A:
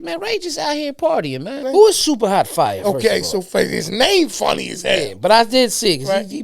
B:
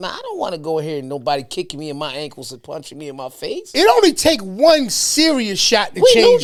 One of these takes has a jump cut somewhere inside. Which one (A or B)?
A